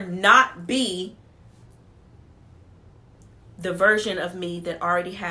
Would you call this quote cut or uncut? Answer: uncut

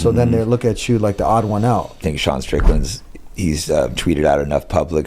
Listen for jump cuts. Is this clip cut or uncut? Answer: cut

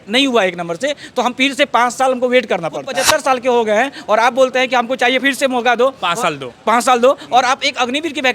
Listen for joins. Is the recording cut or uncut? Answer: cut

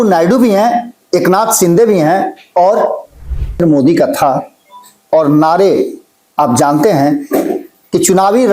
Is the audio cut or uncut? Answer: cut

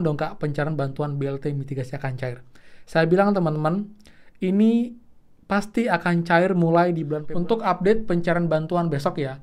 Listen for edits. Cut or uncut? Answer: cut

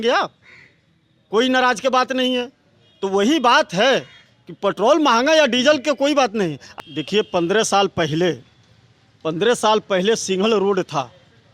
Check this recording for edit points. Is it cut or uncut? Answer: cut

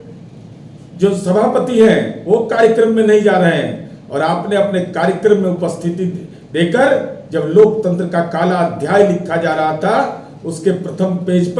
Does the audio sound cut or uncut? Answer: uncut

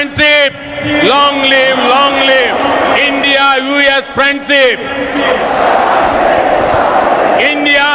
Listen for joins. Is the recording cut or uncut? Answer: uncut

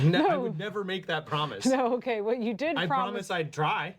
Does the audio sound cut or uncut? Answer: uncut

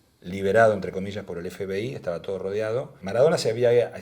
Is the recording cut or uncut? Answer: cut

